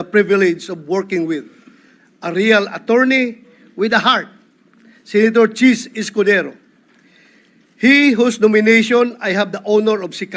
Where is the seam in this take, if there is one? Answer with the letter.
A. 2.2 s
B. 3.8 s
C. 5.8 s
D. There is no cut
D